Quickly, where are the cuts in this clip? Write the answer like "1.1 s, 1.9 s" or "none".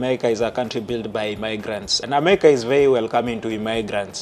2.0 s